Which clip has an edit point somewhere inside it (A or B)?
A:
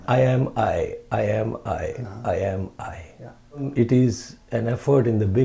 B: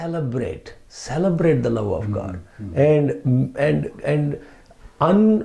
A